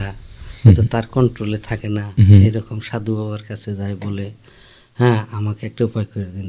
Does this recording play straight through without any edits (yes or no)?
yes